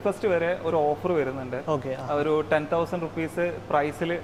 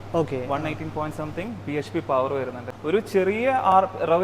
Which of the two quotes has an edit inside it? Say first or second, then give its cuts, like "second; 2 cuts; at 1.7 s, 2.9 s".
second; 1 cut; at 2.7 s